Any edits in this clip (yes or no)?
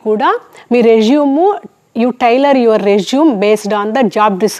no